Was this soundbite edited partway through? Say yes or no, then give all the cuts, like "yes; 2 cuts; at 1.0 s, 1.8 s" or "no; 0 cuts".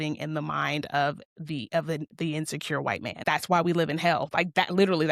yes; 1 cut; at 3.2 s